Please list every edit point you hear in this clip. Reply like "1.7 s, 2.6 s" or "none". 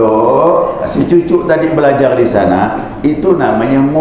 none